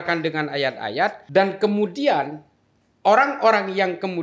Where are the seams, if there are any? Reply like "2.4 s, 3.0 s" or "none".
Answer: 1.2 s